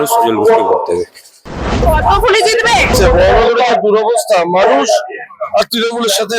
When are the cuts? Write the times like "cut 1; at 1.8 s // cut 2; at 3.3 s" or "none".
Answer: cut 1; at 1.8 s // cut 2; at 2.9 s